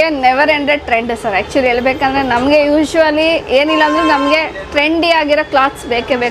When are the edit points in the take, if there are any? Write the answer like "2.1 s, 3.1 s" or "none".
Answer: none

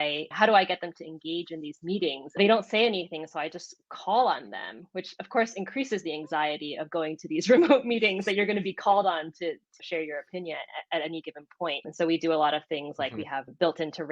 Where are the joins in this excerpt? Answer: 2.4 s

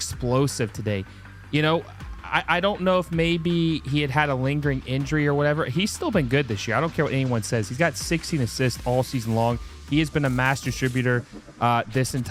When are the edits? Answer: none

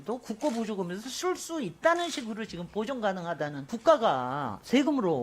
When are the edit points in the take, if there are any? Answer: 3.7 s

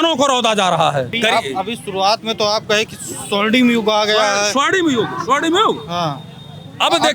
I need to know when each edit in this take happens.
1.1 s

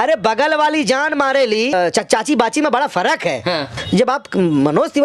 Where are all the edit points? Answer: 1.7 s, 3.7 s

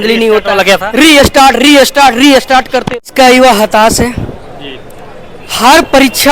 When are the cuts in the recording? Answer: 3.0 s

